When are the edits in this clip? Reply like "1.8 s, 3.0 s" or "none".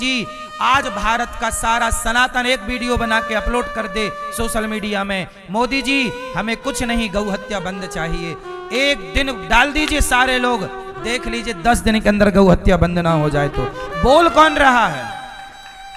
none